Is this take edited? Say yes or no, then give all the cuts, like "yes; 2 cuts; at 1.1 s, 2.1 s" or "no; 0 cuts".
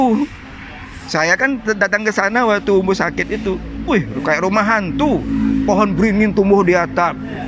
no; 0 cuts